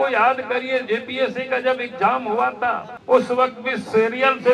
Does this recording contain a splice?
yes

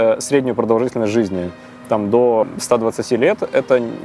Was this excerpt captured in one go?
no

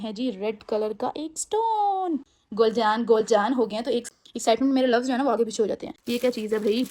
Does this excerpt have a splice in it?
yes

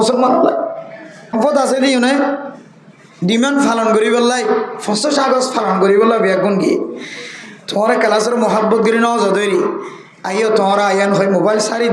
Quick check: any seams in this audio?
yes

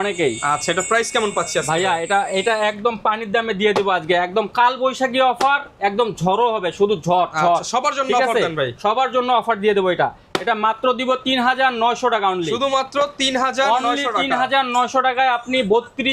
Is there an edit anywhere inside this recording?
no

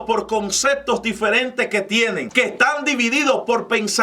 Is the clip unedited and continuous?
no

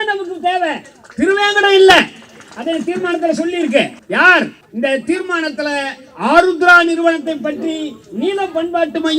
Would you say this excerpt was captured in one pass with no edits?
no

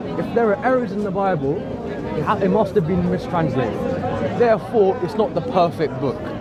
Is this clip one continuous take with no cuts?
yes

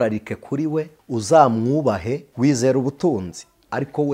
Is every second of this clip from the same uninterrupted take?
no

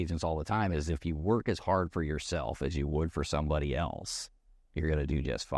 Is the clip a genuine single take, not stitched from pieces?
yes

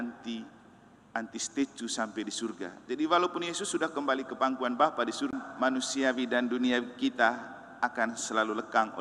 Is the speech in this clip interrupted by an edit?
yes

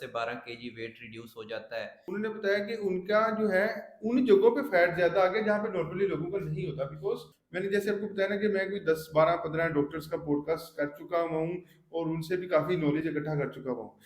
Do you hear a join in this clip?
yes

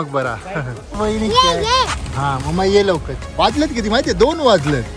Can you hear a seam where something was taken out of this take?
yes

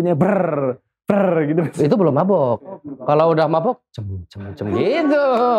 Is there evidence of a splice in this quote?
no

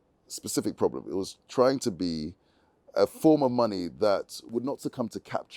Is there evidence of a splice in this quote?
yes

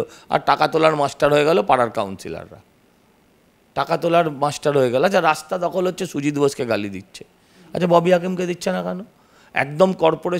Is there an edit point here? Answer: no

